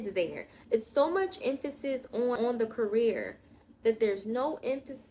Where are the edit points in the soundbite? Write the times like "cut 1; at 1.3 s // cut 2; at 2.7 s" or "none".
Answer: cut 1; at 2.4 s